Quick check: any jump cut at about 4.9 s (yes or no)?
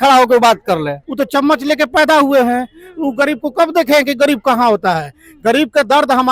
no